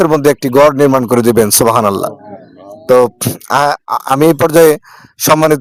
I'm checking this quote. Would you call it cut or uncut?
uncut